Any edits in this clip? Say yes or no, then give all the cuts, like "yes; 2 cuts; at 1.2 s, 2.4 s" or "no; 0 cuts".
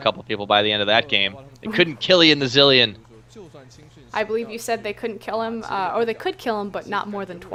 no; 0 cuts